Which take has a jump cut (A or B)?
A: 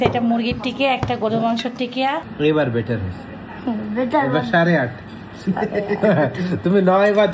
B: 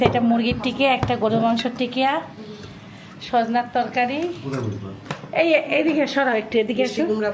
A